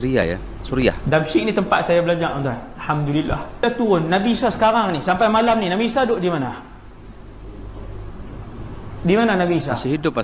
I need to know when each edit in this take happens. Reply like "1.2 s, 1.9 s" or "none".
3.6 s